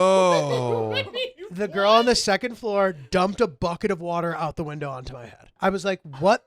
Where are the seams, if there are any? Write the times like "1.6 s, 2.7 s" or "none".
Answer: 5.6 s